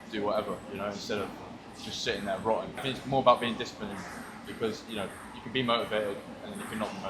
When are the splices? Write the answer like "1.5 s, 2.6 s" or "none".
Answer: none